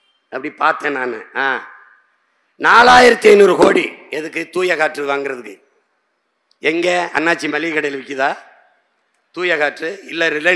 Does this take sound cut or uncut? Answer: uncut